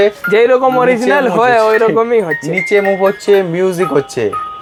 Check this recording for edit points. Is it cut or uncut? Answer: uncut